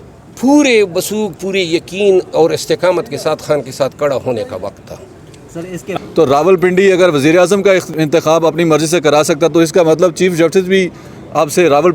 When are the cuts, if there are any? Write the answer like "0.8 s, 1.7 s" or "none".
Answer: 6.0 s, 7.9 s